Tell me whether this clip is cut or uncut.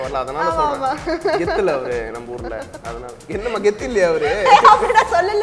uncut